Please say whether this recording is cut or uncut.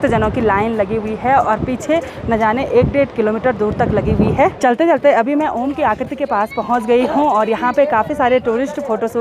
uncut